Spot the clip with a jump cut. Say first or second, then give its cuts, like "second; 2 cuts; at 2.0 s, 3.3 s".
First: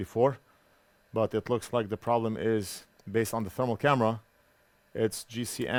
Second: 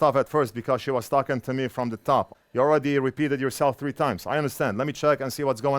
second; 1 cut; at 2.3 s